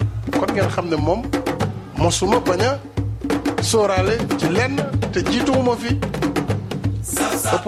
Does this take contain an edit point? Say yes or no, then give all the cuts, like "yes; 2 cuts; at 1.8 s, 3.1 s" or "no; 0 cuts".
no; 0 cuts